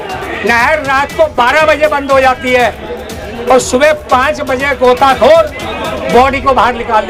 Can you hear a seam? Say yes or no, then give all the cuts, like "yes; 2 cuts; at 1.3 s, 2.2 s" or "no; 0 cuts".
no; 0 cuts